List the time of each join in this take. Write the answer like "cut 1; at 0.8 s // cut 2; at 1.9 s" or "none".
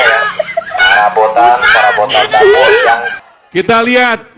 cut 1; at 3.1 s

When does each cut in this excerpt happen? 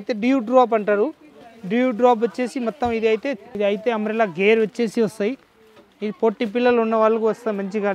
cut 1; at 3.5 s

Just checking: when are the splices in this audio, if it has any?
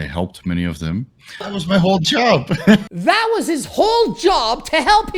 cut 1; at 1.6 s // cut 2; at 2.9 s

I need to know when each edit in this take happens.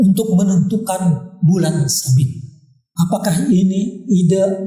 cut 1; at 2.9 s

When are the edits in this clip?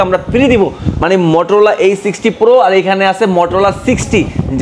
cut 1; at 0.9 s

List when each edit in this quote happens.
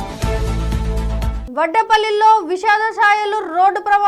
cut 1; at 1.4 s

